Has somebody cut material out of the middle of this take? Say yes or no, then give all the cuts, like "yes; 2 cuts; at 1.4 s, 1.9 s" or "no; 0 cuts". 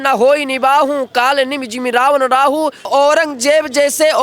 yes; 1 cut; at 2.9 s